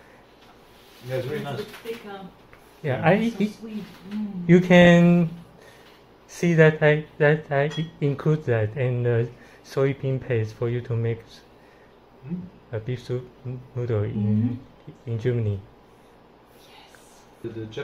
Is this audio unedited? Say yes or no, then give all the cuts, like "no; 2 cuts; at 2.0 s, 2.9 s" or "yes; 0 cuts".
yes; 0 cuts